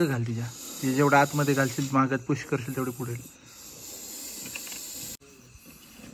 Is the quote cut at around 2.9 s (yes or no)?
no